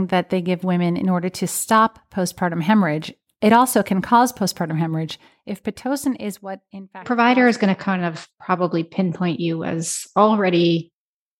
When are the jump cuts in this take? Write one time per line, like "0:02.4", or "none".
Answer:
0:07.0